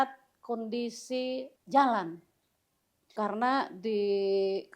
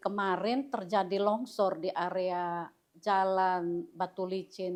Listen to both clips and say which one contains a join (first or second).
first